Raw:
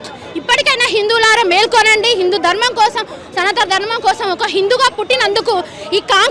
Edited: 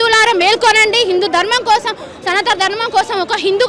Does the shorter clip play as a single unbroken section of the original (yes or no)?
yes